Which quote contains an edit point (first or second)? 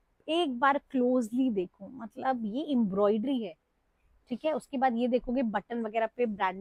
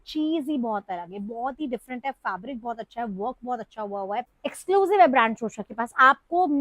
second